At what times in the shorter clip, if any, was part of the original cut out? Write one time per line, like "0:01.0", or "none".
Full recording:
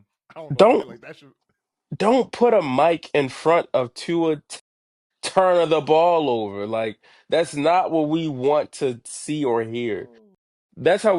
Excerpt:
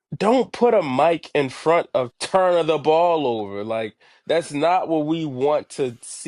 0:02.2